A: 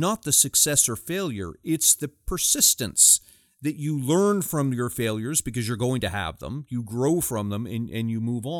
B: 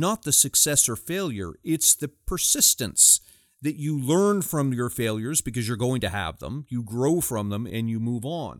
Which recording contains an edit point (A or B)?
B